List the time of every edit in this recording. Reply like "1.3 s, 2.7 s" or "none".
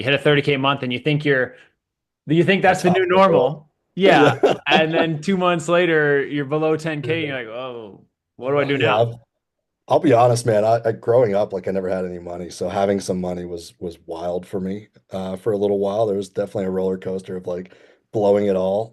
none